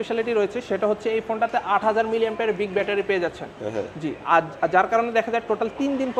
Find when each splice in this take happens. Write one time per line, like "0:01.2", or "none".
none